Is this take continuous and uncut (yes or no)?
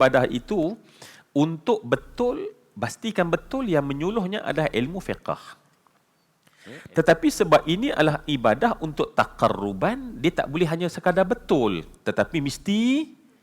no